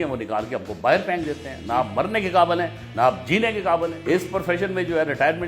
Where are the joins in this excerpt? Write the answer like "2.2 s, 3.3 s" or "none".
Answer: 4.1 s